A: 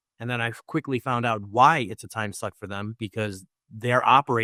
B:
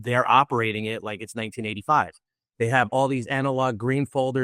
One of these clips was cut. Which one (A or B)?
B